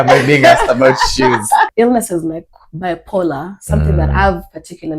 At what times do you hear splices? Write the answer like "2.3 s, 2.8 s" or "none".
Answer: 1.7 s